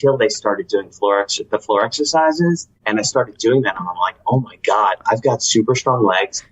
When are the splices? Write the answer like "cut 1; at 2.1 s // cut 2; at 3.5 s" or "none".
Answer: cut 1; at 2.7 s